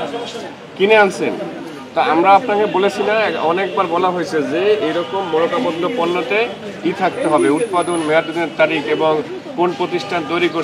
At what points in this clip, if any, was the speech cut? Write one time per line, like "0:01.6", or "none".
none